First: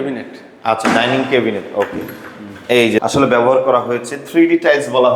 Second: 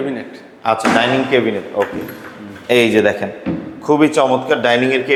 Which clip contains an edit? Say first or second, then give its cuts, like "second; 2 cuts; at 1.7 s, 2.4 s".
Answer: first; 1 cut; at 3.0 s